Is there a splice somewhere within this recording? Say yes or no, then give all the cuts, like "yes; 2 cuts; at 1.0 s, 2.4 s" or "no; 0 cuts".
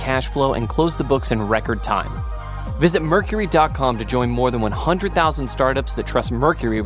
no; 0 cuts